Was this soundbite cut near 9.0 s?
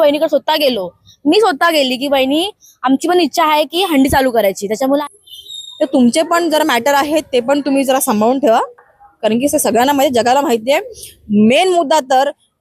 no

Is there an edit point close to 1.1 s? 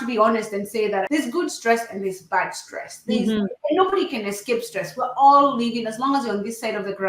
yes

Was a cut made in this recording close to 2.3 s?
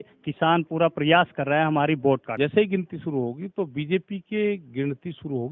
yes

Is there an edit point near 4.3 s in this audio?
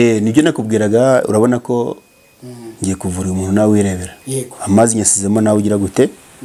no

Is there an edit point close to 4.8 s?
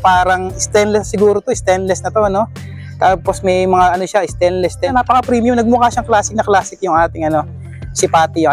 yes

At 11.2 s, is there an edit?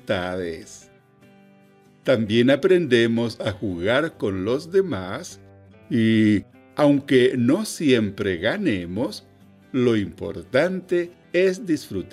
yes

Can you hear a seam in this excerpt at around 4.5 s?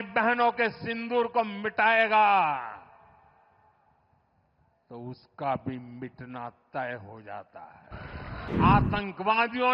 no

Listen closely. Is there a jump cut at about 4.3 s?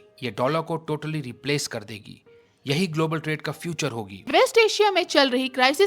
yes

